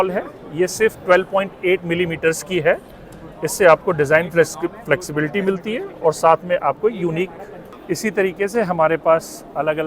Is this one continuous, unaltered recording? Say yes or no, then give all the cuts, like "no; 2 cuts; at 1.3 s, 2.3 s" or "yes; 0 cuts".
no; 1 cut; at 7.8 s